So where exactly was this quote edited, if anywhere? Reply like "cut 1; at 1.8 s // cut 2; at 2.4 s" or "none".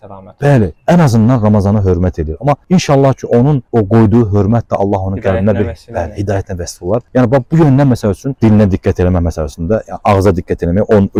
none